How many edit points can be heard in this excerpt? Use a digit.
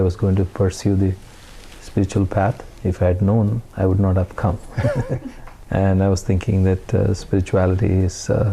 1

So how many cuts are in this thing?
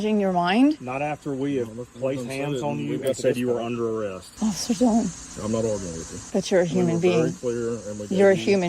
3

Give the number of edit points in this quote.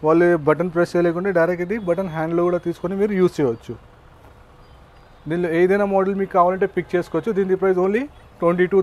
0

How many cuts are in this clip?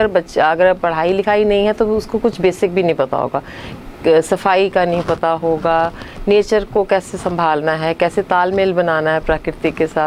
0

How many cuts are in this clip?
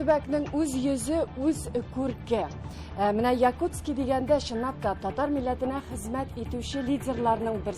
0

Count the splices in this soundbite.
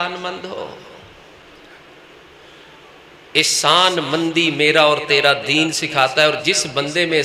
1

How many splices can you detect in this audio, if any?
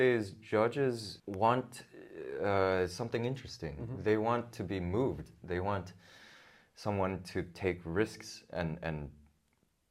1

